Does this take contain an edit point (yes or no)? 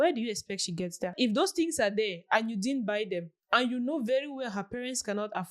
yes